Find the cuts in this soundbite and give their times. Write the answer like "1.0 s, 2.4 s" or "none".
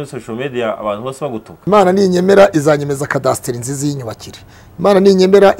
1.5 s